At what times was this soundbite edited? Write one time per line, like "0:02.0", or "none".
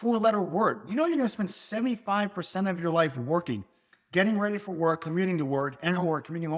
none